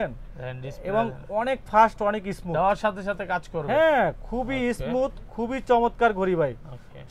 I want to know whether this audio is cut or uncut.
uncut